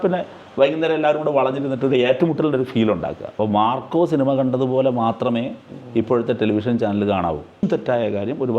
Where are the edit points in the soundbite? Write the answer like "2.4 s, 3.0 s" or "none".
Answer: 3.3 s, 7.6 s